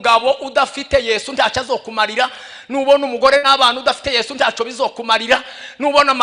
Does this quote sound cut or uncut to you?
uncut